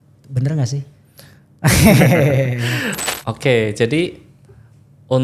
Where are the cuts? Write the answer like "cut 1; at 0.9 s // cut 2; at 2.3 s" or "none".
cut 1; at 2.9 s

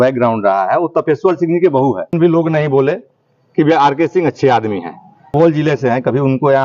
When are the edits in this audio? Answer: cut 1; at 2.1 s // cut 2; at 5.3 s

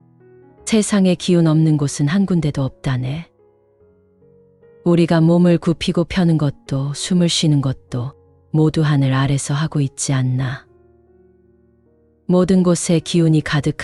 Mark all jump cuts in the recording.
none

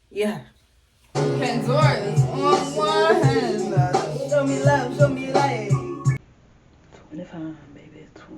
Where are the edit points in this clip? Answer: cut 1; at 1.2 s // cut 2; at 6.3 s

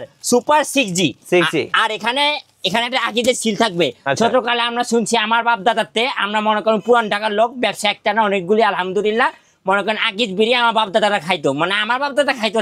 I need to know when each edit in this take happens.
none

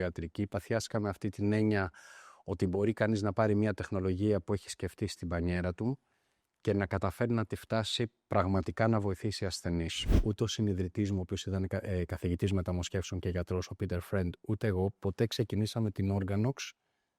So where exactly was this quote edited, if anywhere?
cut 1; at 10.2 s

